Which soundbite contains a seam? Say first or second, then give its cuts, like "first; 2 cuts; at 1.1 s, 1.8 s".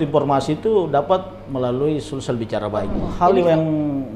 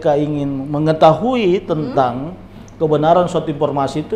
first; 1 cut; at 3.0 s